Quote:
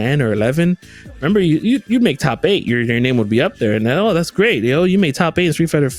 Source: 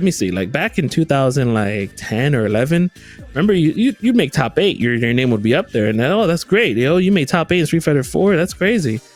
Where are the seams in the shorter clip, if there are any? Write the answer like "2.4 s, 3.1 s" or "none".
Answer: none